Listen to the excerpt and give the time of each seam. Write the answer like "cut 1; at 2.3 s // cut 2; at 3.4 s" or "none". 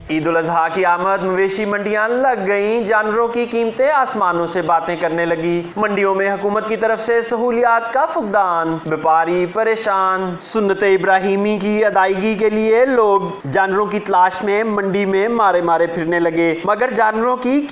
none